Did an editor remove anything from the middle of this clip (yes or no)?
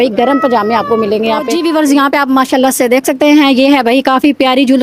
yes